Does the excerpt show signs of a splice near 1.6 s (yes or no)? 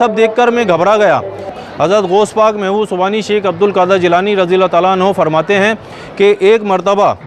yes